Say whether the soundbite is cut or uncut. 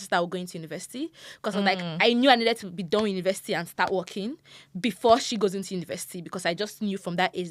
uncut